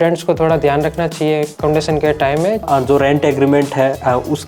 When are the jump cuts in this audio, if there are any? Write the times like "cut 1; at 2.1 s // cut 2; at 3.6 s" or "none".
cut 1; at 1.5 s // cut 2; at 2.6 s